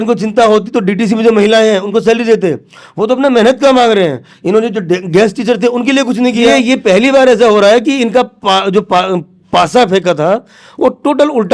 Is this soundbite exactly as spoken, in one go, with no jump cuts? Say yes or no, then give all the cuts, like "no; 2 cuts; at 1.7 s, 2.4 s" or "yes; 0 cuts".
no; 1 cut; at 6.5 s